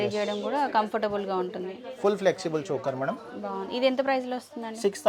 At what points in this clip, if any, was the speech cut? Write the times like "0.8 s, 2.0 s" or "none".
none